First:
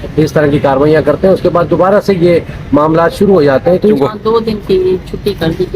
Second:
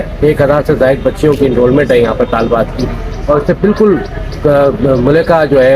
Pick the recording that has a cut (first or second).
first